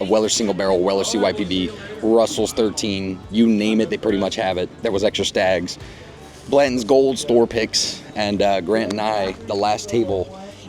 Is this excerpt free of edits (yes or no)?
yes